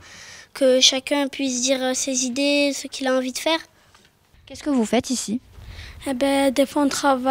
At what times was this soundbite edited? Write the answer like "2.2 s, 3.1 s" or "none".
4.0 s